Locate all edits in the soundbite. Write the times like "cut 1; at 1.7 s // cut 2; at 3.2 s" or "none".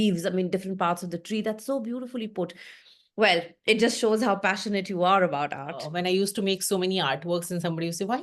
cut 1; at 5.9 s